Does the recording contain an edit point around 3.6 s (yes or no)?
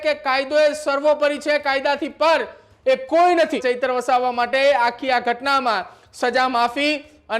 yes